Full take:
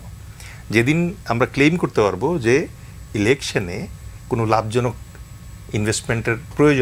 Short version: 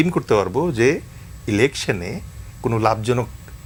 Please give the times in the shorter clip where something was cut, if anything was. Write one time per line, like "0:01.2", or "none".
none